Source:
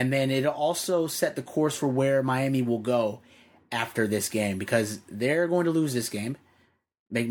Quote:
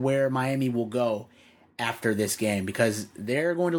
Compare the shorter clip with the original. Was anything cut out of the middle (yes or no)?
no